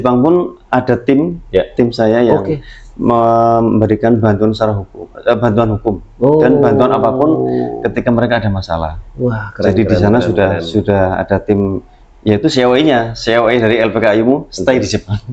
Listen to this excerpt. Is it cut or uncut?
uncut